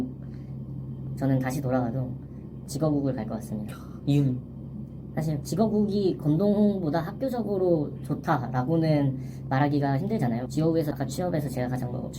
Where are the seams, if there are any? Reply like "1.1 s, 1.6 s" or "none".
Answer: 10.5 s